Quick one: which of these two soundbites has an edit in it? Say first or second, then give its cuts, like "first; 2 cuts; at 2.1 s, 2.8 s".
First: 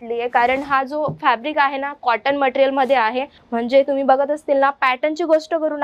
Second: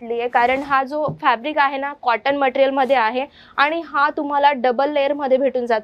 first; 1 cut; at 3.4 s